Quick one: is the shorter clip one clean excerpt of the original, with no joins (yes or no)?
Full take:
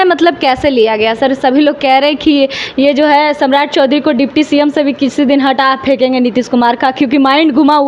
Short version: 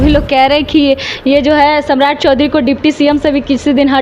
yes